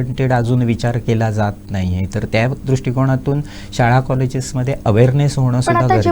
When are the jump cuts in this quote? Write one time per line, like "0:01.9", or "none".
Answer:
none